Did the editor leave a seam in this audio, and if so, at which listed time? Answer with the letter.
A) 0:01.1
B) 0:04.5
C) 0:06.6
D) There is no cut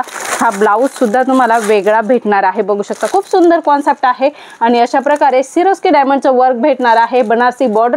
D